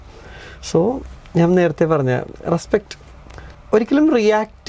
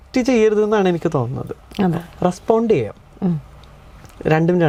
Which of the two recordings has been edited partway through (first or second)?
first